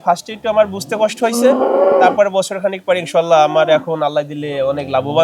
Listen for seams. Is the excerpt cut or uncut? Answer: uncut